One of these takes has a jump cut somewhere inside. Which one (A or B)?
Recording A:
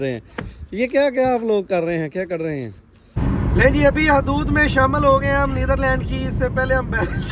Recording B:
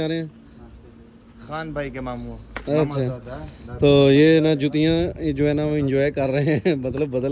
A